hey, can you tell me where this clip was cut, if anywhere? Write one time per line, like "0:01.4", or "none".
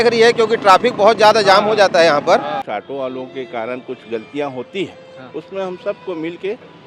0:02.6